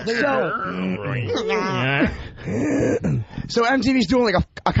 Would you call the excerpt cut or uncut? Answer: cut